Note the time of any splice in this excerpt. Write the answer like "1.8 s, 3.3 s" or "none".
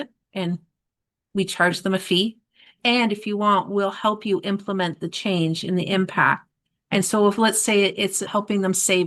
2.7 s, 8.3 s